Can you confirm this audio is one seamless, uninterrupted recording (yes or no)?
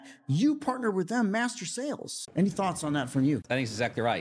no